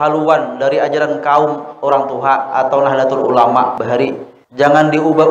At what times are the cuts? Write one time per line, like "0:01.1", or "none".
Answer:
0:03.9